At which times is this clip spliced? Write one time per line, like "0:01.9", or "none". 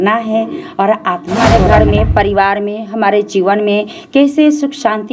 0:01.5